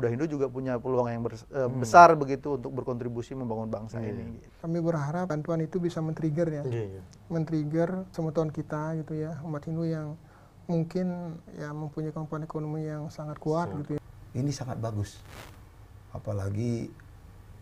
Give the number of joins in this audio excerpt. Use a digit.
5